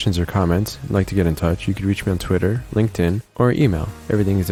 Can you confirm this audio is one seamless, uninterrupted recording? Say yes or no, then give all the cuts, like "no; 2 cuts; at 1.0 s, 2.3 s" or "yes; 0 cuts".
yes; 0 cuts